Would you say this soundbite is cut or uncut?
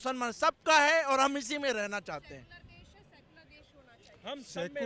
uncut